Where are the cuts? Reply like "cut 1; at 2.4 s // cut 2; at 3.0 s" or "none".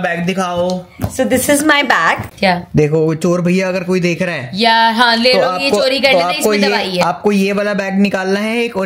cut 1; at 2.2 s